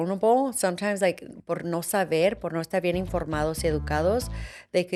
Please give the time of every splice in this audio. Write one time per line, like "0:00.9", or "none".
none